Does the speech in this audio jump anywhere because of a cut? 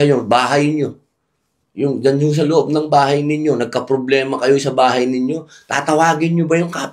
no; 0 cuts

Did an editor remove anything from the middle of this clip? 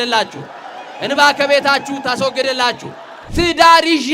yes; 1 cut; at 3.2 s

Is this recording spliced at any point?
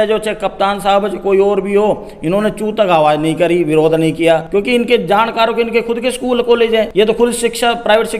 yes; 2 cuts; at 4.4 s, 6.9 s

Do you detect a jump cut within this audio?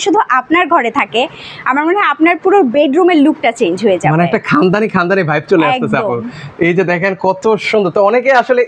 no; 0 cuts

